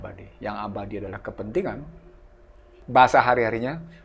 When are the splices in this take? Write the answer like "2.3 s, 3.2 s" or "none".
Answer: 2.8 s